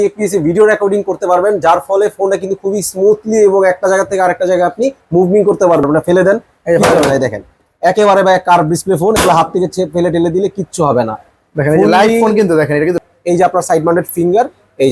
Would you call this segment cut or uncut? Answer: cut